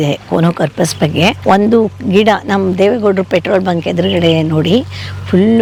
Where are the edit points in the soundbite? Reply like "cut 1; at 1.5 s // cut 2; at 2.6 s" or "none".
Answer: none